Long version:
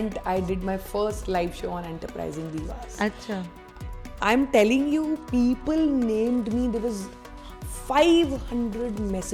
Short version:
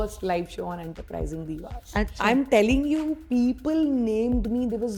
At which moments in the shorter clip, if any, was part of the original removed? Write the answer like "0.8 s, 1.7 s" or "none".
2.1 s